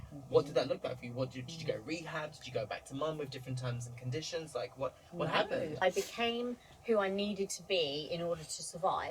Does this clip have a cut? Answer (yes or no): yes